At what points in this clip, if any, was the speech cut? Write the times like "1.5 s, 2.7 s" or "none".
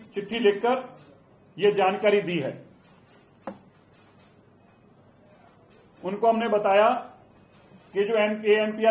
none

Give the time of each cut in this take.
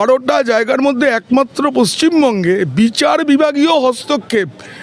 none

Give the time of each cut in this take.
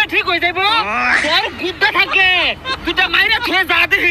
none

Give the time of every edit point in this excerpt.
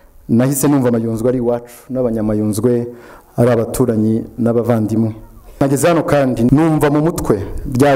5.6 s, 6.5 s

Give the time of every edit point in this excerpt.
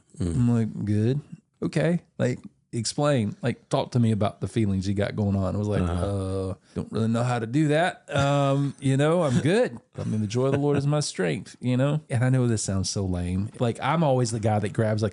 1.4 s, 6.6 s, 12.1 s, 13.5 s

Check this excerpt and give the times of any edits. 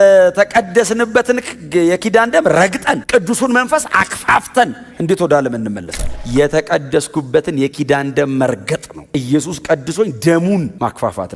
6.2 s

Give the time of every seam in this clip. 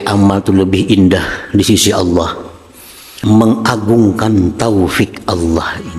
3.1 s

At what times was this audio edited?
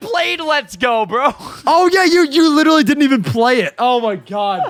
none

